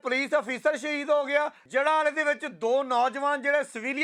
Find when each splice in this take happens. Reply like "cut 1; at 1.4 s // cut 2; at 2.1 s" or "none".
none

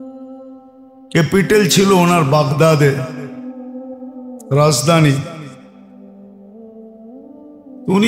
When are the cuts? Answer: none

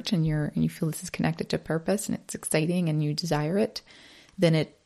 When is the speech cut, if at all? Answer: none

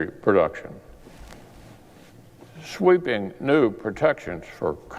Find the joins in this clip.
cut 1; at 1.5 s

